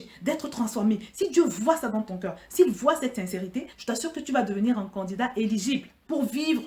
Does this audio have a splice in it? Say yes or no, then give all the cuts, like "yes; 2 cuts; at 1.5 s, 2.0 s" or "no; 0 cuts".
no; 0 cuts